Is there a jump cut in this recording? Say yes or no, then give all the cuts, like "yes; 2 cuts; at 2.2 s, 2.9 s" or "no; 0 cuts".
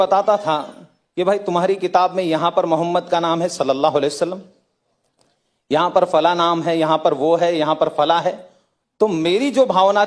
no; 0 cuts